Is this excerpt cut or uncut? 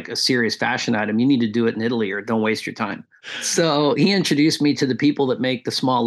cut